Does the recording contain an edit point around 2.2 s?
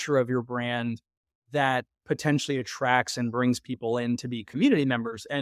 no; 0 cuts

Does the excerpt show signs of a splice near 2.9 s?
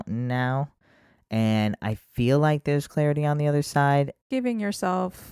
no; 1 cut; at 4.2 s

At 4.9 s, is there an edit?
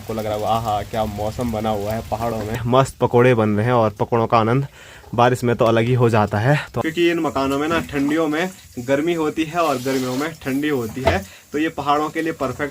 no; 2 cuts; at 2.6 s, 6.7 s

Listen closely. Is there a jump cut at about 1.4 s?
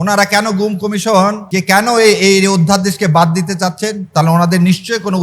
yes; 1 cut; at 1.4 s

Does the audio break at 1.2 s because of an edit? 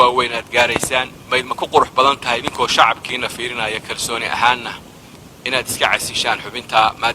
yes; 1 cut; at 1.2 s

